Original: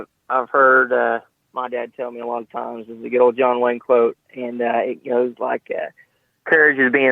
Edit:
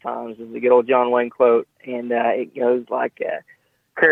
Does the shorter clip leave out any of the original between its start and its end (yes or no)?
no